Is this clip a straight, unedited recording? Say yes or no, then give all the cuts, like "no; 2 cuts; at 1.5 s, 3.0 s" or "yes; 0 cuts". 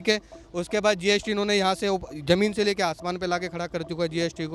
yes; 0 cuts